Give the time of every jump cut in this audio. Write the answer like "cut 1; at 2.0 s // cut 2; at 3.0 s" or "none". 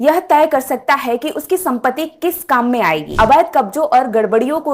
cut 1; at 3.1 s